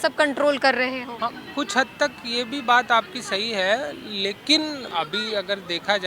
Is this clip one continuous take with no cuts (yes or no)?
no